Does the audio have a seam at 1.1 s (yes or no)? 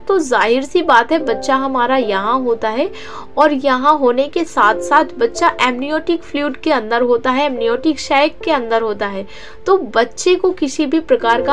no